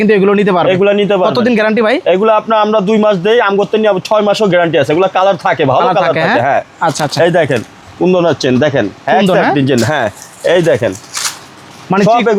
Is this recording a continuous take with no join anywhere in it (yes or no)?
yes